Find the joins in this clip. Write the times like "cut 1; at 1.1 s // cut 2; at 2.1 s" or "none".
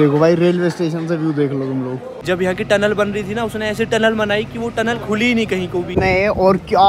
cut 1; at 2.1 s // cut 2; at 6.0 s